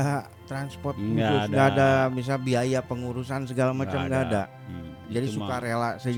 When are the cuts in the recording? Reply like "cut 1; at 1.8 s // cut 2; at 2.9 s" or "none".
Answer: none

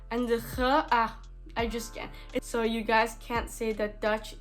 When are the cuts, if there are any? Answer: cut 1; at 2.5 s

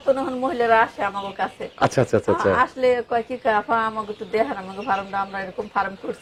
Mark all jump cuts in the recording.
none

